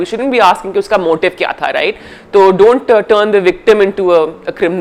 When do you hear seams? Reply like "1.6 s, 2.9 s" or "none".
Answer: none